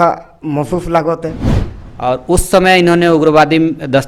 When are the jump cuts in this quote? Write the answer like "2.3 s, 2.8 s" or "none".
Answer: 1.5 s